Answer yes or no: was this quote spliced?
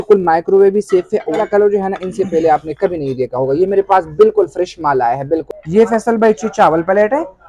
yes